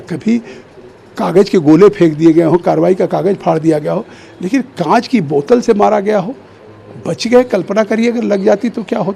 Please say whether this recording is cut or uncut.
uncut